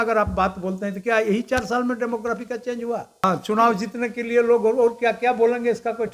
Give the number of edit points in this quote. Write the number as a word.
one